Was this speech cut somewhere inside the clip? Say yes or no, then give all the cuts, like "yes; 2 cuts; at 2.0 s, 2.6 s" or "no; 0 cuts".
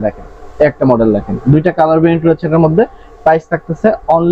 no; 0 cuts